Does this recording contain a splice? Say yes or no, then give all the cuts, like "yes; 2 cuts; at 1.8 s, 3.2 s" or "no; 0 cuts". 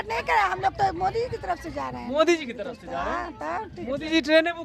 no; 0 cuts